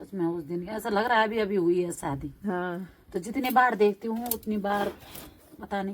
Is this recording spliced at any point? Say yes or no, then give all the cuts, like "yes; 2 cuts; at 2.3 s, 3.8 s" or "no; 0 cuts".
no; 0 cuts